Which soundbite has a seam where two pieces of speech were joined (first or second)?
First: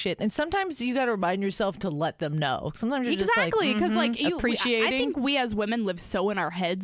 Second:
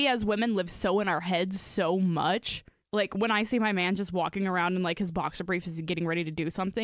second